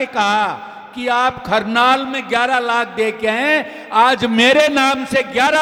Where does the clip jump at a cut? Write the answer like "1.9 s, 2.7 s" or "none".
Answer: none